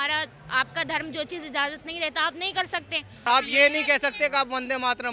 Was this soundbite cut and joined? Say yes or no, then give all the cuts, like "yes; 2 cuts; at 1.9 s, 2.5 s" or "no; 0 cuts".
yes; 1 cut; at 3.3 s